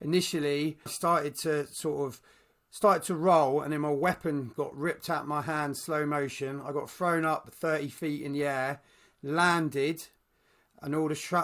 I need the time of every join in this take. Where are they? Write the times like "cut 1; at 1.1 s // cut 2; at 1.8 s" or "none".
cut 1; at 0.9 s